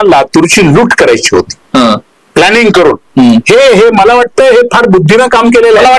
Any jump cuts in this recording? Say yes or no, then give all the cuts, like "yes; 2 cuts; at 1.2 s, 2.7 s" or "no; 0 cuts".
no; 0 cuts